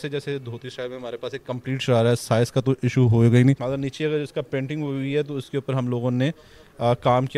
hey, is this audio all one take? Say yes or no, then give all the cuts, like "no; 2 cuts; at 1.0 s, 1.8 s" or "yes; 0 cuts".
no; 1 cut; at 3.6 s